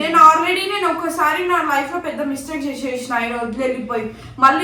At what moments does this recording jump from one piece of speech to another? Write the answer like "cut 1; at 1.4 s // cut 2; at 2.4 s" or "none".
none